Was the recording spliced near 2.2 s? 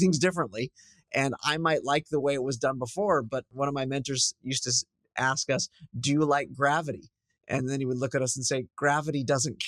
no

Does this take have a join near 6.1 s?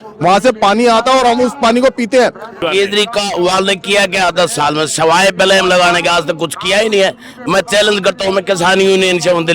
no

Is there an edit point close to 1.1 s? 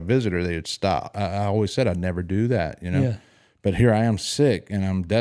yes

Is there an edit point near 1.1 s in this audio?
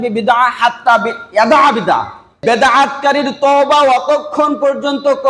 no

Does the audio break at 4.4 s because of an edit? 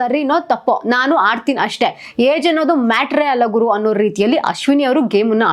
no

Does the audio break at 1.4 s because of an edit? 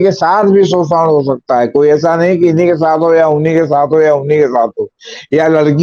no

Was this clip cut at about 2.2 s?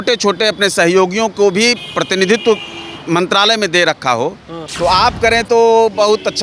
no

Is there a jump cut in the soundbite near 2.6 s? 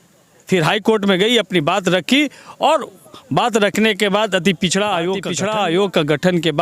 no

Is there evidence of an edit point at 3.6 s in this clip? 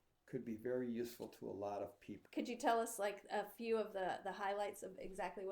no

